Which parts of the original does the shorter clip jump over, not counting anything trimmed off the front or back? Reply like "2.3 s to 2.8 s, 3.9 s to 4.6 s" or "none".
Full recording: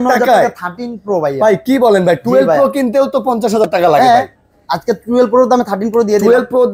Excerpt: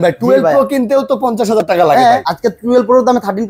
4.3 s to 4.7 s